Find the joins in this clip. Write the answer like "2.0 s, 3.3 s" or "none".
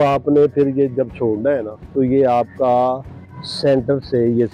1.8 s